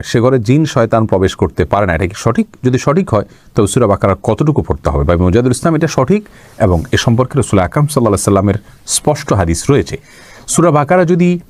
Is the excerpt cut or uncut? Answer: uncut